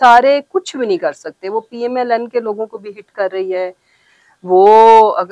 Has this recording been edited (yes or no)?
no